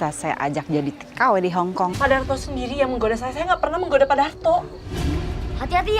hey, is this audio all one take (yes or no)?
no